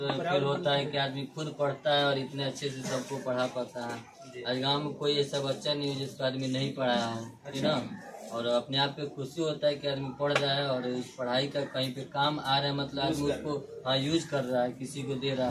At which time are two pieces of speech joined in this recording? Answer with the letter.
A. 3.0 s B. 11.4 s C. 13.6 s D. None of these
D